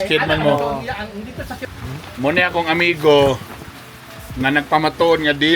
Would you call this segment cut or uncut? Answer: cut